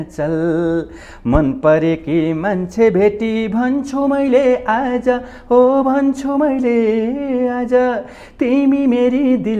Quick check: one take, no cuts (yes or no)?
yes